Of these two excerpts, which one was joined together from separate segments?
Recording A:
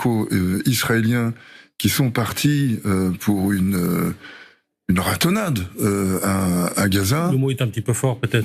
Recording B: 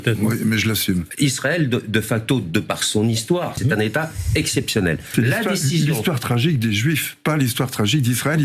B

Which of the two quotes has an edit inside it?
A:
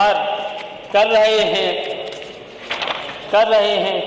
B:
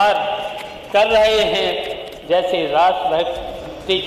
B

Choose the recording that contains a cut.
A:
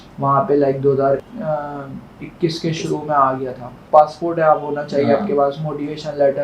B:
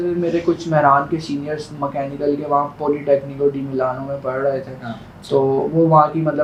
A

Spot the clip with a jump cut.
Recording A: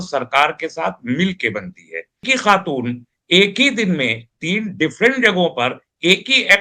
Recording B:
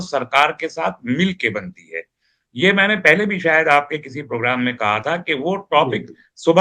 A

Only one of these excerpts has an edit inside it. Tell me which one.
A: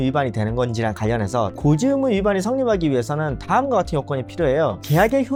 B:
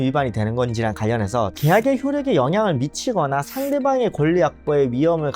B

